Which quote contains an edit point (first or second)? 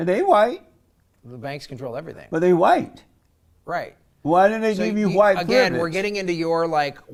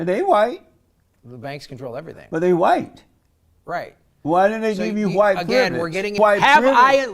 second